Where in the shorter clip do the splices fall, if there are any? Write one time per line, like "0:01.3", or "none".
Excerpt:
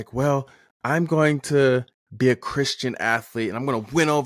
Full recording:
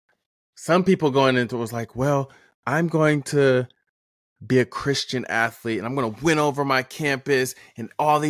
0:02.0